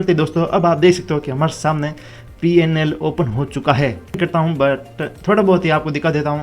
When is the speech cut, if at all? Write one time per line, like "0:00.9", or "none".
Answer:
0:04.2